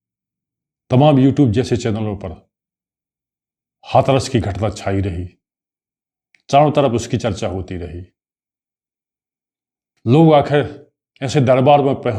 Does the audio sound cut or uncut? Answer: uncut